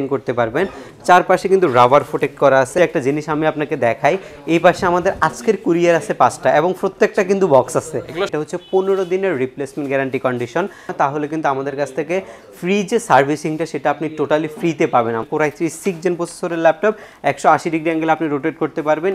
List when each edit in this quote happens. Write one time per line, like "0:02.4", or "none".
0:02.8
0:08.3
0:10.9
0:15.2